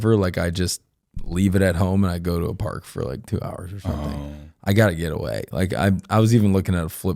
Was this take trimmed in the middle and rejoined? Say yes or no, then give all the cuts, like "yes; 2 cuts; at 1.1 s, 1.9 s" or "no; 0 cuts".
no; 0 cuts